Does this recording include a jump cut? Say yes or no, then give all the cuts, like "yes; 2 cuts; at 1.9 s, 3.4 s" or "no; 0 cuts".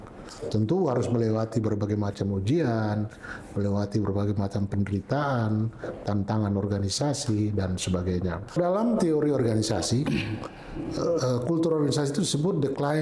yes; 1 cut; at 8.6 s